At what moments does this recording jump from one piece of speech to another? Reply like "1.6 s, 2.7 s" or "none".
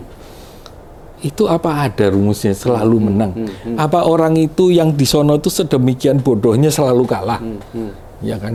none